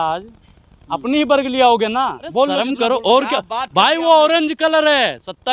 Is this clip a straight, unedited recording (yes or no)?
no